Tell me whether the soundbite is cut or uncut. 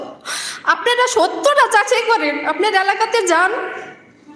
uncut